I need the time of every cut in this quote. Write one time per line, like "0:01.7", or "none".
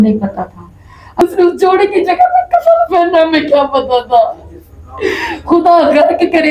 0:01.2